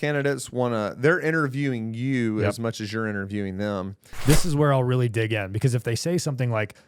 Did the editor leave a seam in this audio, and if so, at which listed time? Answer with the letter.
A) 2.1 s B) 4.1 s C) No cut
B